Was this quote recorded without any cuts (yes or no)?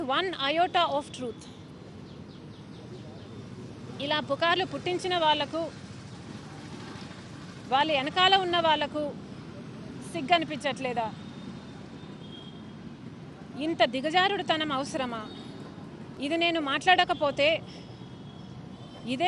no